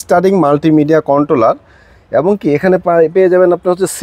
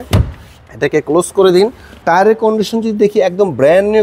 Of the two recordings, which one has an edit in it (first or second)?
second